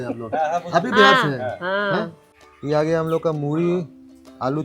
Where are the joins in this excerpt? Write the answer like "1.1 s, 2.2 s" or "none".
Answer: 2.6 s